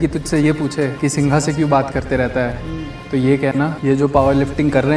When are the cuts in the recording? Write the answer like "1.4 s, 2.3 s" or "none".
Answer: 0.9 s, 3.8 s